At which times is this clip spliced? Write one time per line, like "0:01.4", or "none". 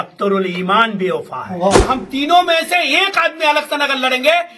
0:01.9